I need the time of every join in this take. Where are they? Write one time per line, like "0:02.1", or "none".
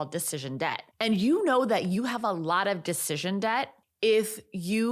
0:00.9
0:03.8